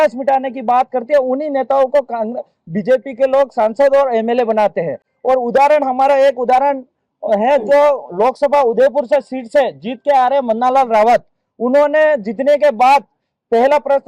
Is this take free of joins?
yes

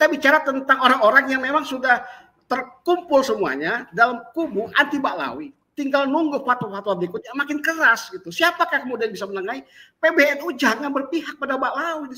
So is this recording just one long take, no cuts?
yes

